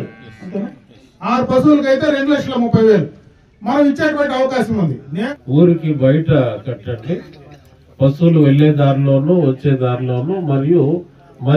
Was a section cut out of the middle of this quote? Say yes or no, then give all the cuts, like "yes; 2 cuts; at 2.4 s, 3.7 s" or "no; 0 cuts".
yes; 1 cut; at 5.3 s